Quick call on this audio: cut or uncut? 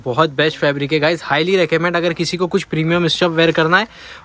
uncut